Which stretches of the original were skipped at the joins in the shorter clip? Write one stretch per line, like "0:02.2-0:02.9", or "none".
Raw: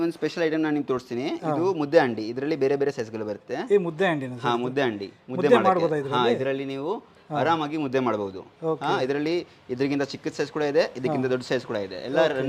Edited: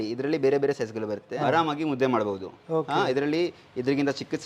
0:03.4-0:07.2